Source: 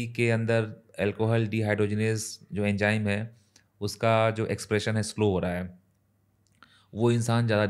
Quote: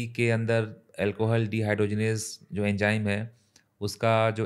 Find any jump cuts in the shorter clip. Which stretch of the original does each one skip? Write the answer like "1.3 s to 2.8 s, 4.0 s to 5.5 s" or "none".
none